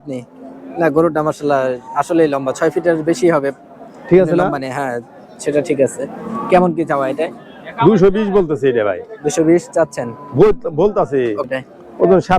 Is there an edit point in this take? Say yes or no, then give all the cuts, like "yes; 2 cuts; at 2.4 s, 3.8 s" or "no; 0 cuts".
yes; 1 cut; at 11.5 s